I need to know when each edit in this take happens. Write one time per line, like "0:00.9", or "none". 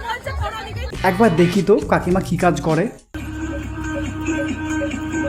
0:00.9